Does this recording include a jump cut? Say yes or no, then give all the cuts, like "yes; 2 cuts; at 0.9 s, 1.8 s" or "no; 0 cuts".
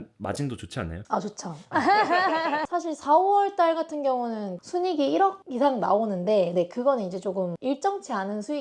yes; 1 cut; at 2.7 s